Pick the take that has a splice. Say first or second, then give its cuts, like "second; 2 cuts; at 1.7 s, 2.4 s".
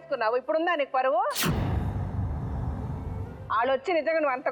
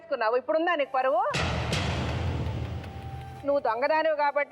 second; 2 cuts; at 1.4 s, 3.4 s